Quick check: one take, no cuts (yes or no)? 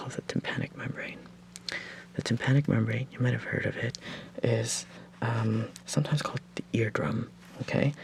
yes